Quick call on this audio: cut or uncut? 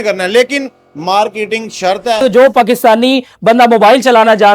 cut